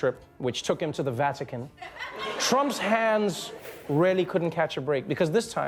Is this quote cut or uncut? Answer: uncut